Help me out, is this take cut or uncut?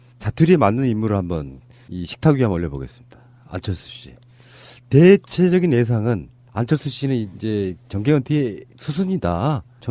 uncut